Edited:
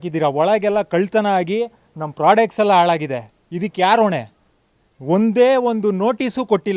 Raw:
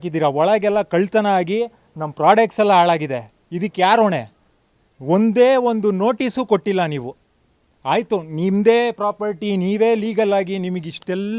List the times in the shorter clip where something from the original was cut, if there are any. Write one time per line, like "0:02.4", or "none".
none